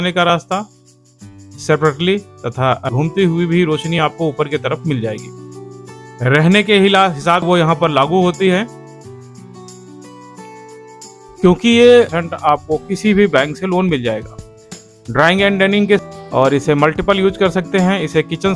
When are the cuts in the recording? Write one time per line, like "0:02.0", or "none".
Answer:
0:02.9
0:07.4
0:12.2
0:16.0